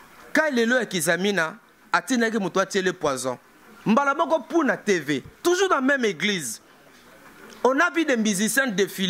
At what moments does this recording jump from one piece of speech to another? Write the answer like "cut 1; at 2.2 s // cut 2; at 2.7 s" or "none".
none